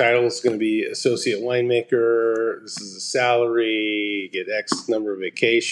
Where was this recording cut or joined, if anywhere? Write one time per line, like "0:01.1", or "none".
none